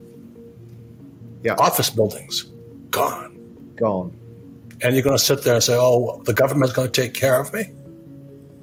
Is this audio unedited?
yes; 0 cuts

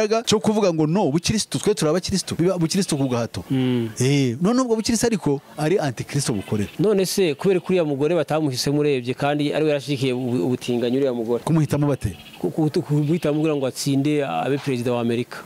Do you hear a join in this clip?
no; 0 cuts

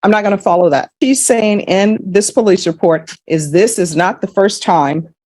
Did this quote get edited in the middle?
yes; 1 cut; at 0.9 s

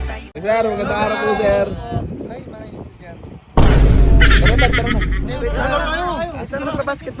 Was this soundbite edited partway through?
no; 0 cuts

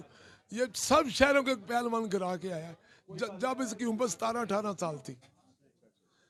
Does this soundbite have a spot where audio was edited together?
no; 0 cuts

